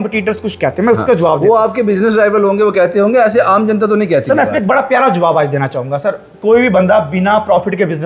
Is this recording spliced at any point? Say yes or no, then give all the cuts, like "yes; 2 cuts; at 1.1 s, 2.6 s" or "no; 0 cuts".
no; 0 cuts